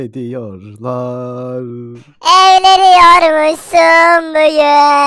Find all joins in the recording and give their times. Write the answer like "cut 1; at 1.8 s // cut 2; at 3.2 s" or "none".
none